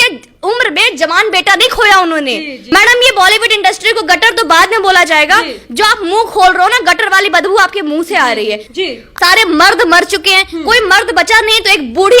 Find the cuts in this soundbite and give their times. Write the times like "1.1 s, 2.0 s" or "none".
2.7 s, 9.0 s

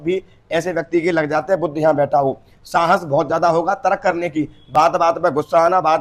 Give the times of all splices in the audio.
none

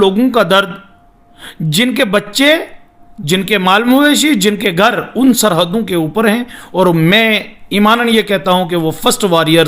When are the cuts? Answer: none

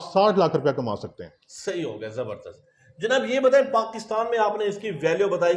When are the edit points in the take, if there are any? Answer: none

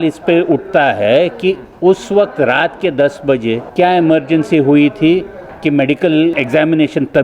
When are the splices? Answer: 3.6 s, 6.3 s

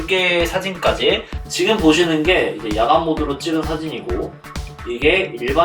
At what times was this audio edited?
1.4 s

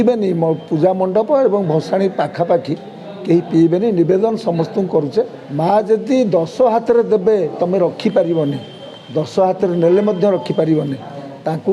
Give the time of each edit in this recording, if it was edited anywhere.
5.4 s

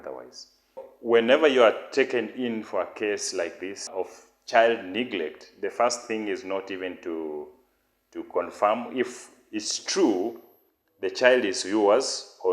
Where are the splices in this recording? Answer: 0.9 s, 3.9 s

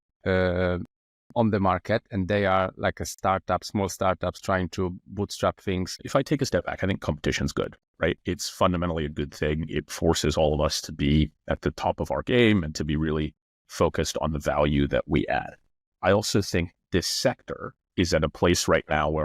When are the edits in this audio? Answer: 6.0 s

